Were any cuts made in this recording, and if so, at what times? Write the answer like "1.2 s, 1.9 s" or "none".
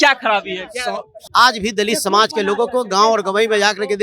1.1 s